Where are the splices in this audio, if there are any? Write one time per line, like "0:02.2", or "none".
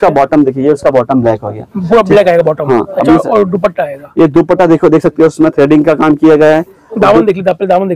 none